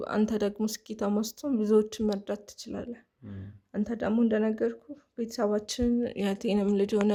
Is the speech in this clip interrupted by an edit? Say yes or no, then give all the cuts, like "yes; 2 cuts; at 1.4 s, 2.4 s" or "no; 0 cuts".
no; 0 cuts